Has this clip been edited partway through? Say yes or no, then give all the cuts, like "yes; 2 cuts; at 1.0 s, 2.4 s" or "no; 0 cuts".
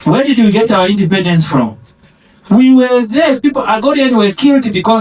no; 0 cuts